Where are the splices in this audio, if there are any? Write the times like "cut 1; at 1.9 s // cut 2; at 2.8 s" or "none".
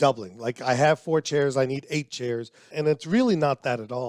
cut 1; at 2.7 s